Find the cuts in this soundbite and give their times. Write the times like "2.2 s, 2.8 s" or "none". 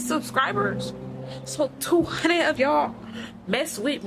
none